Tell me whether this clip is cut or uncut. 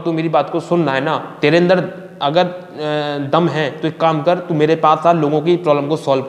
cut